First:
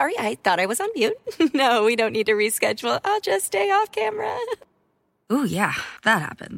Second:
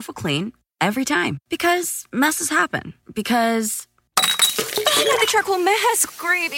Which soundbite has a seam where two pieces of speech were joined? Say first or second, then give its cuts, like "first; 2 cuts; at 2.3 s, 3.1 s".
second; 1 cut; at 3.5 s